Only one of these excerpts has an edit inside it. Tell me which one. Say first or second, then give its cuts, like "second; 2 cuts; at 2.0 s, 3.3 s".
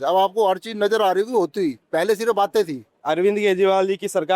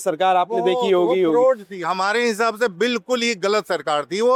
first; 2 cuts; at 1.8 s, 2.9 s